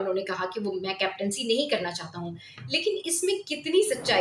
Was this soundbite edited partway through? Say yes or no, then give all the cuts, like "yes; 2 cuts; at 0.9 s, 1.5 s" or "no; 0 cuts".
no; 0 cuts